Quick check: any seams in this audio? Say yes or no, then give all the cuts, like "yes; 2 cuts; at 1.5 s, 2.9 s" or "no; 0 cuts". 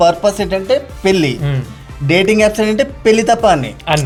no; 0 cuts